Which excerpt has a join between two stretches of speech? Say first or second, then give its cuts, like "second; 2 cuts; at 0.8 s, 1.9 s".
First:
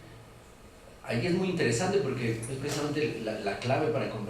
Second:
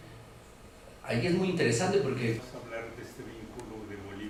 first; 1 cut; at 2.4 s